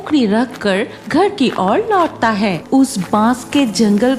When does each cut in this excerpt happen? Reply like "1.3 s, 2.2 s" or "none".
2.6 s